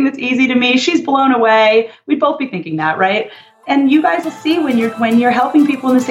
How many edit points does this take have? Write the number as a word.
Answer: one